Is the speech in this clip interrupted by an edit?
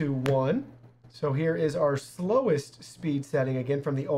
no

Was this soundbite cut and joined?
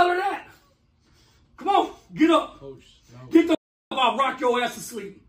no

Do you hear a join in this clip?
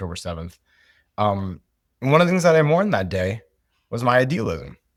no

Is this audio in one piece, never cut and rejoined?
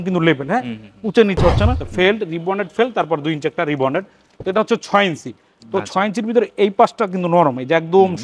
no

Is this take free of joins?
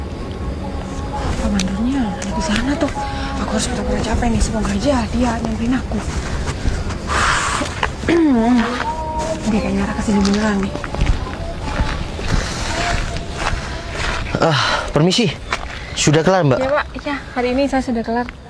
yes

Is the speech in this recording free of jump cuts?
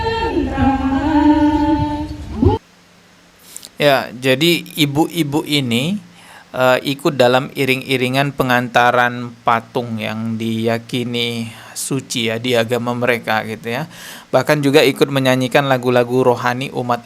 yes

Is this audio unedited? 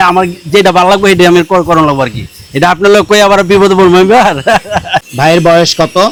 yes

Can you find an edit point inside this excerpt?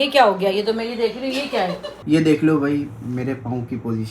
yes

